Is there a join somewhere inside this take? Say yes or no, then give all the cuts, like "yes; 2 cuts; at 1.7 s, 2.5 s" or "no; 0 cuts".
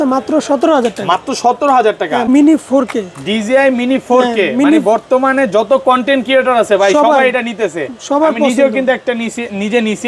yes; 1 cut; at 2.3 s